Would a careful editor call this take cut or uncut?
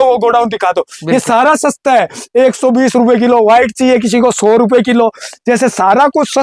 uncut